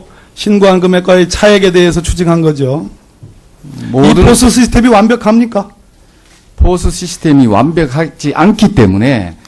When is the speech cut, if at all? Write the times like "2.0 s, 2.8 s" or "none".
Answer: 1.1 s